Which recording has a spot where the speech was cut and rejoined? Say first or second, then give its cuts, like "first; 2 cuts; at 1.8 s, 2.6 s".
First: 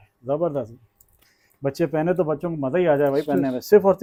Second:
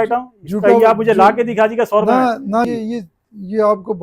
second; 1 cut; at 2.7 s